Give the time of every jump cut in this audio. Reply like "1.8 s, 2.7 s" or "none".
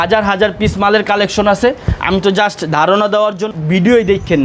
3.4 s